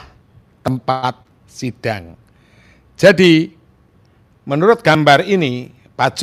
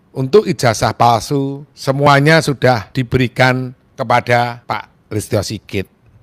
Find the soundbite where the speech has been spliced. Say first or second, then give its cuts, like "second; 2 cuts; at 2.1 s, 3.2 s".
second; 4 cuts; at 1.7 s, 2.9 s, 3.8 s, 4.6 s